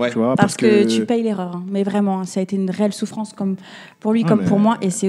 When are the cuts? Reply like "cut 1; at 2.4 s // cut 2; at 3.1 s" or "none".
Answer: none